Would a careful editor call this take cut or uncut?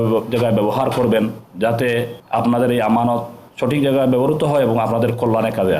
cut